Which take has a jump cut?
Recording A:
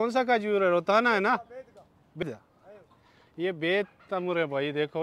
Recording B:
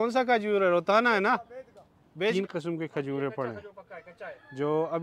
B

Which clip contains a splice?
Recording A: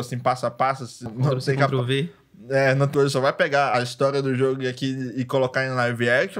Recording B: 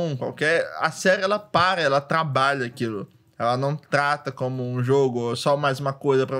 A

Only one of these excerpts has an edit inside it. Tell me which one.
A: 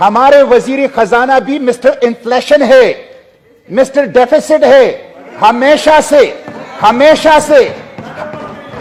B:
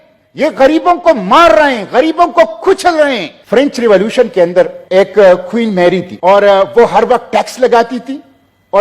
B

